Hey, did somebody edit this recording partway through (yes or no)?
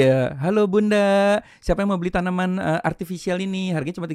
no